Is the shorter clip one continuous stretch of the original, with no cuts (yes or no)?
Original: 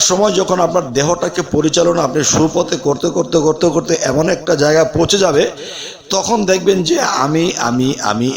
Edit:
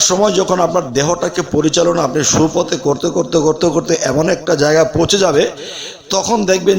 yes